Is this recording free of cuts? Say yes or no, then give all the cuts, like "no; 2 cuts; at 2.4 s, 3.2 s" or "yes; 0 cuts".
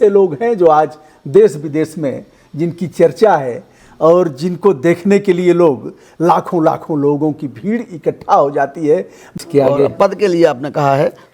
no; 1 cut; at 9.2 s